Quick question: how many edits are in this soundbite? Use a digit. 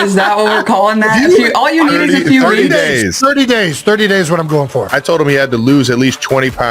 1